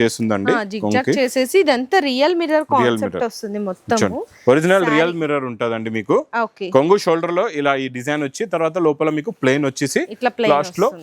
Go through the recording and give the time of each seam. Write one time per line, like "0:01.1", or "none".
none